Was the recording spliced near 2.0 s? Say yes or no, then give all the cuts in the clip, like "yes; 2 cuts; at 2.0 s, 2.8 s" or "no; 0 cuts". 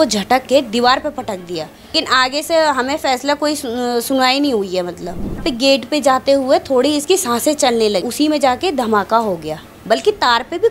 yes; 3 cuts; at 2.0 s, 5.4 s, 8.1 s